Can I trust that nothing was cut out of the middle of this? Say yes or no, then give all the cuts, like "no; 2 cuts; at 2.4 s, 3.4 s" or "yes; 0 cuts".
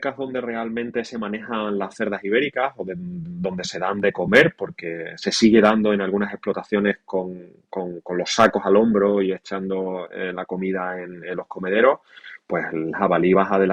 yes; 0 cuts